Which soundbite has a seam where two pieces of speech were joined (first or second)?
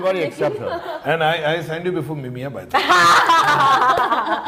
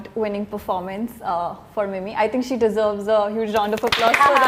first